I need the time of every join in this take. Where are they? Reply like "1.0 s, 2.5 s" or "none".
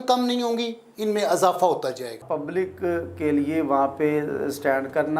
2.3 s